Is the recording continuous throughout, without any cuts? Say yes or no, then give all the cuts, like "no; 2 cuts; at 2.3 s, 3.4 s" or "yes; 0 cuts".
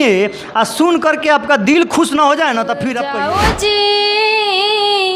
no; 1 cut; at 3.0 s